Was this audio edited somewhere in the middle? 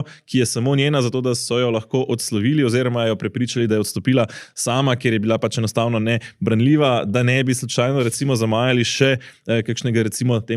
no; 0 cuts

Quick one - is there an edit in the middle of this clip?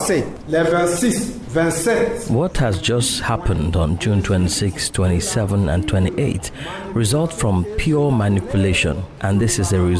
no; 0 cuts

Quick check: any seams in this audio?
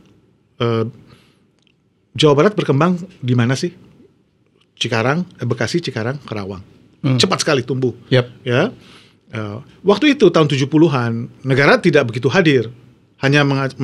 no; 0 cuts

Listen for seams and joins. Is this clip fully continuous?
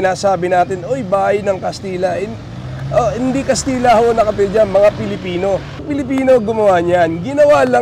no; 1 cut; at 5.8 s

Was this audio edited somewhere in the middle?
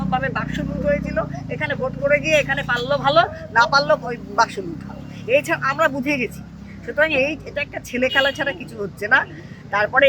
no; 0 cuts

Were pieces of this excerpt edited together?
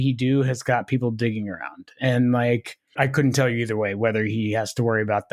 no; 0 cuts

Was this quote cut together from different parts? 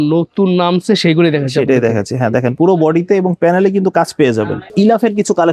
yes; 1 cut; at 4.6 s

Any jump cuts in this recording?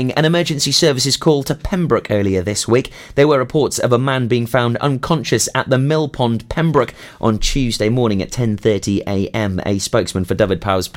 no; 0 cuts

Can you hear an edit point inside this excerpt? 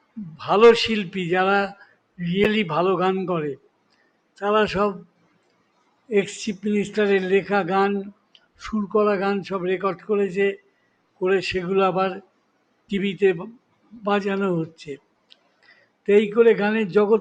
no; 0 cuts

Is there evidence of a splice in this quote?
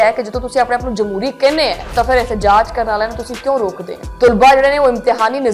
no; 0 cuts

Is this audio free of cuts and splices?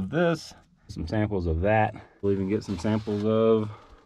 no; 2 cuts; at 1.0 s, 2.2 s

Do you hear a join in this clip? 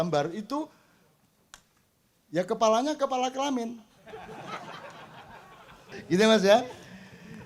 yes; 1 cut; at 6.0 s

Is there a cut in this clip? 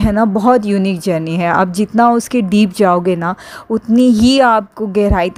no; 0 cuts

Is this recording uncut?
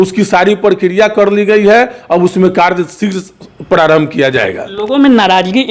yes; 0 cuts

